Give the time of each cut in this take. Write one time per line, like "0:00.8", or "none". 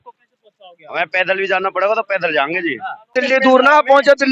0:03.1